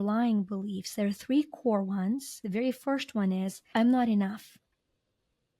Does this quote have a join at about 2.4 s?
yes; 2 cuts; at 2.4 s, 3.6 s

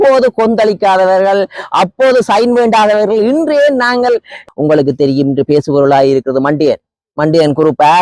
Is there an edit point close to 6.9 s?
no; 1 cut; at 4.4 s

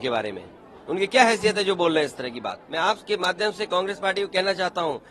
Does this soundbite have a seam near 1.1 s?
no; 1 cut; at 2.6 s

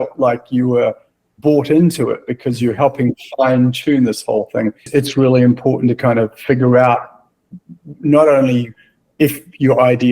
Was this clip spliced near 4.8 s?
yes; 1 cut; at 4.8 s

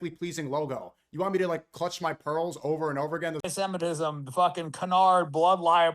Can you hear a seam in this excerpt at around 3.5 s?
yes; 1 cut; at 3.5 s

